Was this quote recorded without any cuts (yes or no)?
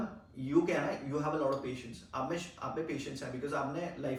yes